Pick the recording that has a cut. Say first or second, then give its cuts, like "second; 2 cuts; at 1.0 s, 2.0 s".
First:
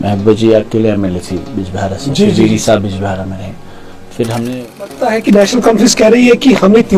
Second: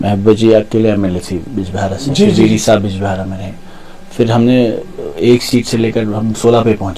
first; 1 cut; at 5.0 s